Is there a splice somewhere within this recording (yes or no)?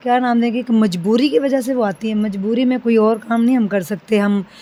no